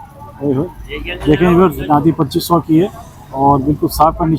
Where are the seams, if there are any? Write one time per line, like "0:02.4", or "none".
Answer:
none